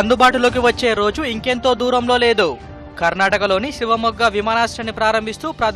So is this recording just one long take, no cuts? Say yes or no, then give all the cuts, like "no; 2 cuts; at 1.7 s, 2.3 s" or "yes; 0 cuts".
yes; 0 cuts